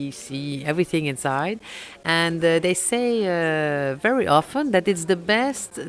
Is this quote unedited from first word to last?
yes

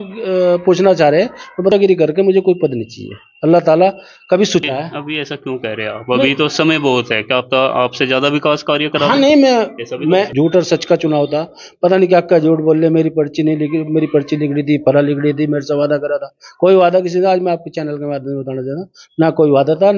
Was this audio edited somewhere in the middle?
yes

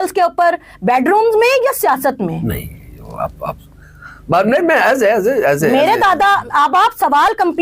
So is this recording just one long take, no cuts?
yes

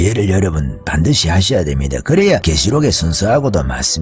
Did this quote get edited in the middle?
yes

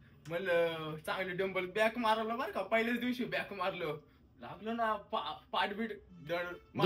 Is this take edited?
no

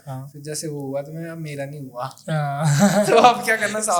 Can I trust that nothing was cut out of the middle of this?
yes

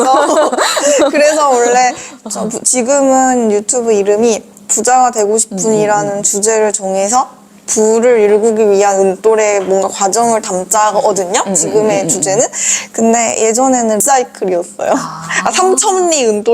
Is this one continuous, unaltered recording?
no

